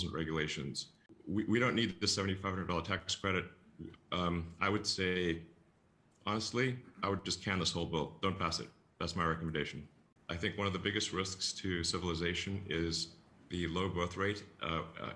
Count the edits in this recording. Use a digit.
2